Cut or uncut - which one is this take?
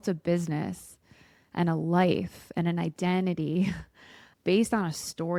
uncut